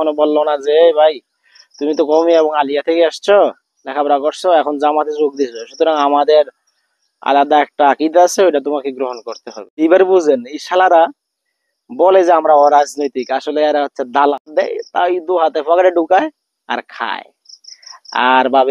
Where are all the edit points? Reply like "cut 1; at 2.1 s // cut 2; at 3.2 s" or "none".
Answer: cut 1; at 9.8 s // cut 2; at 14.5 s